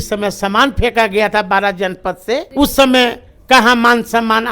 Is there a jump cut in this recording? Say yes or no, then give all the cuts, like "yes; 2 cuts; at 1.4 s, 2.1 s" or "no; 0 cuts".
yes; 1 cut; at 2.5 s